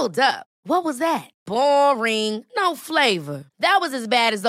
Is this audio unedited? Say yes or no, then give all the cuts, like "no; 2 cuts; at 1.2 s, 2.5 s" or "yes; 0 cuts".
yes; 0 cuts